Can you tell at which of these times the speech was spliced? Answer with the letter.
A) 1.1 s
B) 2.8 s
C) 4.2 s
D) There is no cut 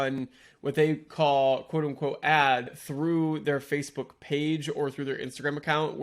B